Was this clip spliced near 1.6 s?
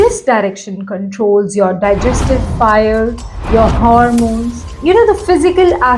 no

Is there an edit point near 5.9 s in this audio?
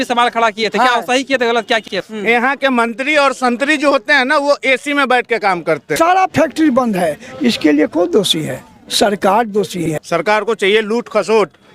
yes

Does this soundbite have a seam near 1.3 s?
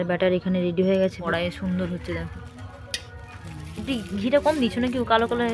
yes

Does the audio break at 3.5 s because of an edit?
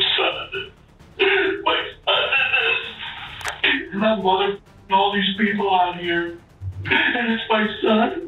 yes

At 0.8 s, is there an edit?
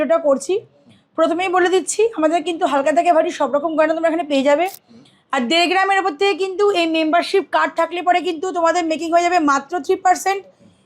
no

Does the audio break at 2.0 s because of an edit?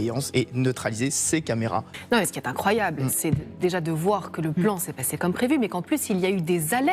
yes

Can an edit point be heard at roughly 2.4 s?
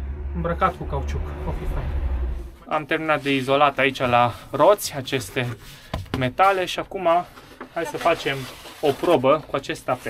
yes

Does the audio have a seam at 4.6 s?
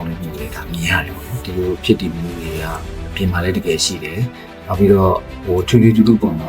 no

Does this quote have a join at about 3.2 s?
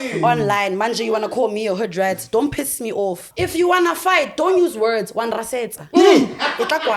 yes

